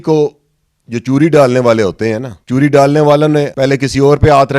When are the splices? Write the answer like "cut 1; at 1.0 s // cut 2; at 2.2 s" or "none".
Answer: cut 1; at 2.3 s // cut 2; at 3.5 s